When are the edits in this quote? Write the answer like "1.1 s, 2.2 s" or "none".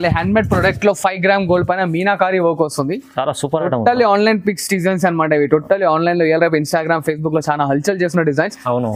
none